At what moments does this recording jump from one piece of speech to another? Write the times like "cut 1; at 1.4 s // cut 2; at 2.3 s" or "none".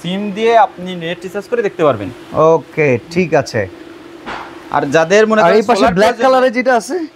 none